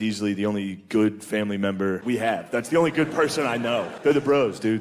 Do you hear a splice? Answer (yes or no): yes